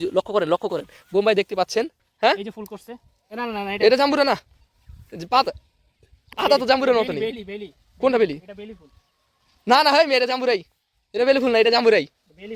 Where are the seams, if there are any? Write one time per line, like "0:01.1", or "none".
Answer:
0:02.0